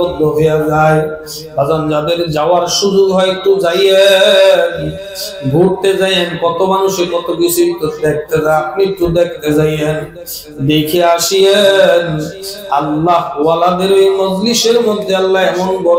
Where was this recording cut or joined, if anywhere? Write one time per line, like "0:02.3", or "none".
none